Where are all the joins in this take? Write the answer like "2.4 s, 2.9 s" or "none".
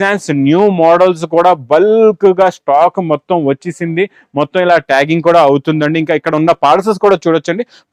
none